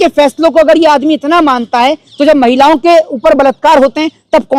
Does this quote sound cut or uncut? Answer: uncut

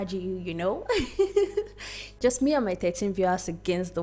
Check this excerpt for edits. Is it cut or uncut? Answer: cut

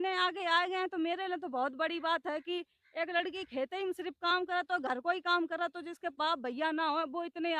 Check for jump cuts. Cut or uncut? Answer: uncut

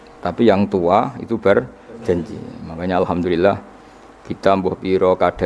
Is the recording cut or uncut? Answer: uncut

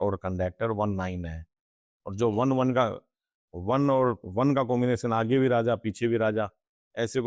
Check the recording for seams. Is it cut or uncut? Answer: uncut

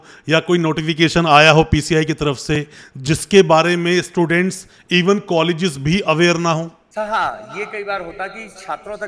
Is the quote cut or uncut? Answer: cut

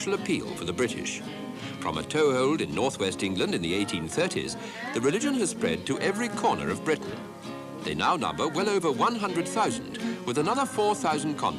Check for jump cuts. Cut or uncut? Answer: cut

